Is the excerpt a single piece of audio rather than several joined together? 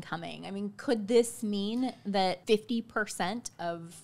no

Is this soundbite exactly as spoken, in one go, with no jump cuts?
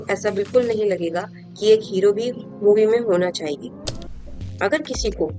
no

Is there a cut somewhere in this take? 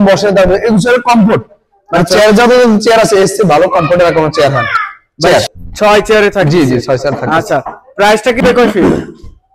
yes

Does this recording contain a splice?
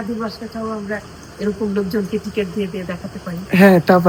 no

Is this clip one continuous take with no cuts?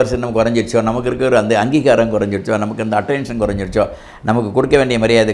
yes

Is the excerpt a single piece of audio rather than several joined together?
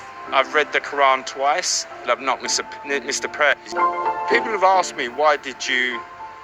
no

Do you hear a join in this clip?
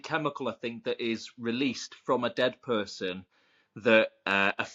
no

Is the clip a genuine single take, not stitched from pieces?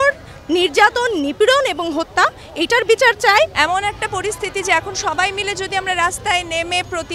no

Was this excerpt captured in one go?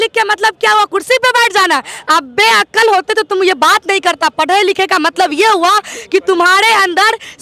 yes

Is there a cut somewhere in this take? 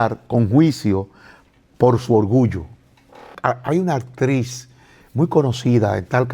yes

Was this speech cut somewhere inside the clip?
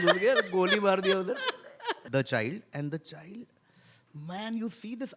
yes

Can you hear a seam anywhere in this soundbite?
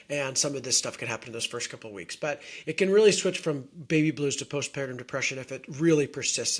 no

